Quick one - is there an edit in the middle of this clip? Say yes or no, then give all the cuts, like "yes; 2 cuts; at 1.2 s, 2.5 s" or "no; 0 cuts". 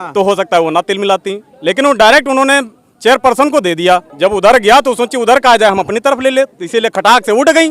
yes; 1 cut; at 4.1 s